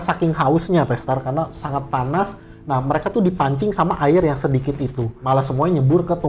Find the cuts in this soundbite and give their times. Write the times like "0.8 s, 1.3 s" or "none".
5.2 s